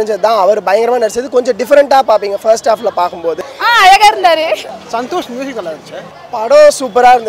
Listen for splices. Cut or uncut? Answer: cut